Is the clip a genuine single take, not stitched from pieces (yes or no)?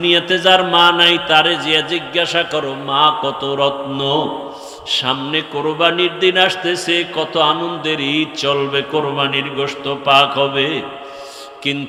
yes